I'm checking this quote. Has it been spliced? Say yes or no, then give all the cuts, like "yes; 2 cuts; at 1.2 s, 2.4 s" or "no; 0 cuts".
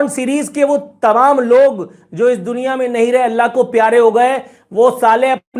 no; 0 cuts